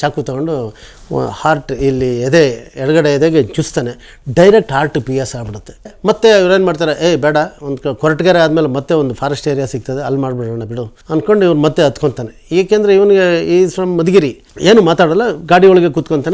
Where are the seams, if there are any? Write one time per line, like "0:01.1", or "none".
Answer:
0:05.8
0:10.9
0:14.5